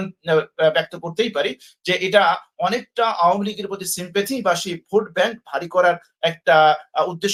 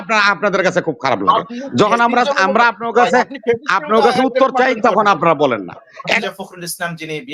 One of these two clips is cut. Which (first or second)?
second